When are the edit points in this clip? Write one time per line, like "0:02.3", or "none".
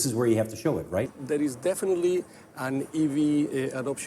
0:01.1